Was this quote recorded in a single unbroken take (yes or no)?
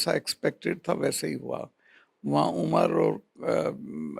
yes